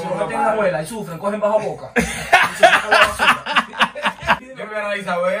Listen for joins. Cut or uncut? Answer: cut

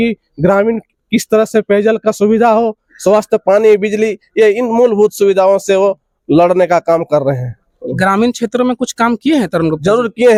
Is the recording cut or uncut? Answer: uncut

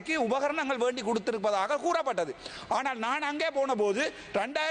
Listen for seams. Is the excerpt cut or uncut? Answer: uncut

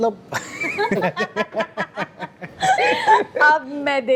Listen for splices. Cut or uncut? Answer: uncut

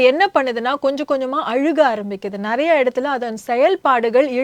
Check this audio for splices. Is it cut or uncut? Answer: uncut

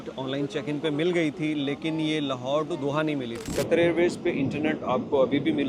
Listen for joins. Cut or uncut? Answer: cut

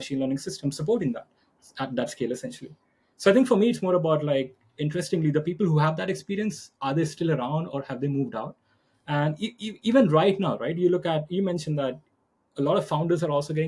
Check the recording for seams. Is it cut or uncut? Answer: uncut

